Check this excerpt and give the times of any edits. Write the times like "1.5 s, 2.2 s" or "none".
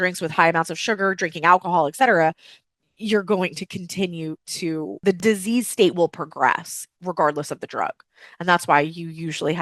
5.1 s